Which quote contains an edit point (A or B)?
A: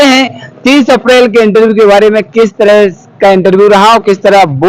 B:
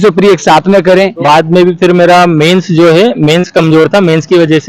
B